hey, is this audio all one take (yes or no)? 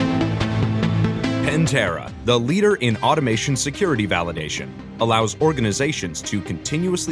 no